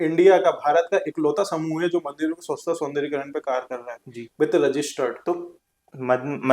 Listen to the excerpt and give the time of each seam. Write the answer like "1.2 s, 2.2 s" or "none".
5.2 s